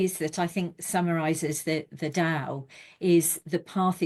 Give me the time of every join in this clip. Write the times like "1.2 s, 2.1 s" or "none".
none